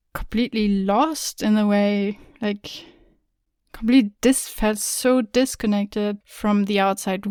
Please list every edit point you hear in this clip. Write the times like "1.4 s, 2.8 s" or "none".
none